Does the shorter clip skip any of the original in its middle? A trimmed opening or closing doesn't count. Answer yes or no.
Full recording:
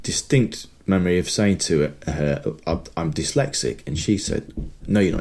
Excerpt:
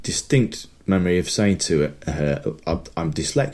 no